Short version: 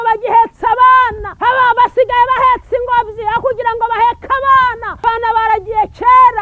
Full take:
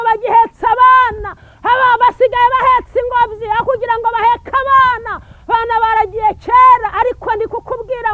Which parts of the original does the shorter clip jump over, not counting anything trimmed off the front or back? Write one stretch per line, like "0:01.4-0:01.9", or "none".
0:01.2-0:01.5
0:05.1-0:05.3